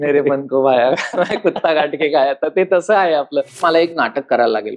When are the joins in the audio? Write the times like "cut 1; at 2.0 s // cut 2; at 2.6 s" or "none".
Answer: cut 1; at 3.6 s

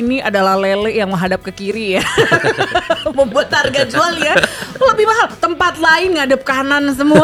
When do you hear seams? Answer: none

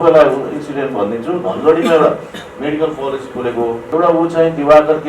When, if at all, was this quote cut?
cut 1; at 3.8 s

